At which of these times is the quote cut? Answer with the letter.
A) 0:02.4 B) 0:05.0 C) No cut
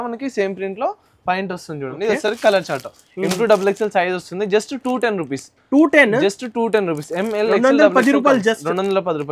C